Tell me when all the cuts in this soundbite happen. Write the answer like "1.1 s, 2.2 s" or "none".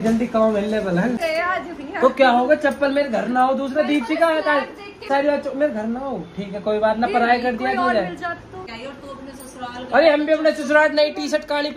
1.2 s, 5.0 s, 8.5 s